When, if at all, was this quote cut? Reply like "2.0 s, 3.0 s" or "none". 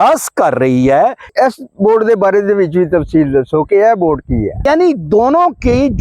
1.3 s, 4.6 s